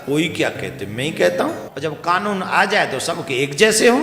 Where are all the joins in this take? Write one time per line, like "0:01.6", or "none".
0:01.7